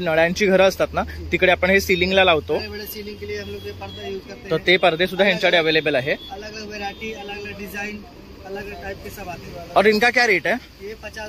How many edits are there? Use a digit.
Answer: 0